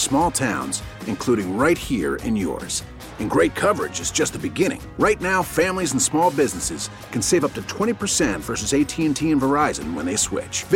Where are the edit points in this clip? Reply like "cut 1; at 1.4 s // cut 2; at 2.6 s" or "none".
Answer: none